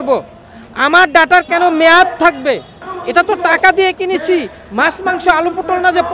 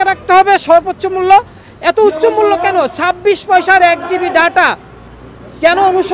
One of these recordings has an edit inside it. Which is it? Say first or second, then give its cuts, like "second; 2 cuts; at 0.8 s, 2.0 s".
first; 1 cut; at 2.9 s